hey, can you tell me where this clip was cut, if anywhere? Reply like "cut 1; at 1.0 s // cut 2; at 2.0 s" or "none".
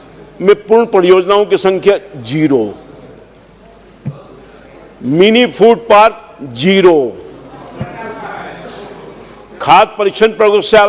none